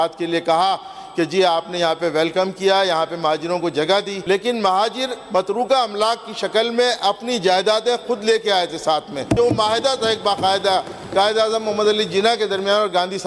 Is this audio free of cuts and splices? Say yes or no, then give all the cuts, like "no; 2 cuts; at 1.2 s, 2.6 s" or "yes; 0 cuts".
no; 2 cuts; at 4.1 s, 9.4 s